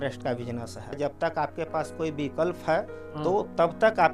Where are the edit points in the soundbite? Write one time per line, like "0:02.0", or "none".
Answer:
0:00.9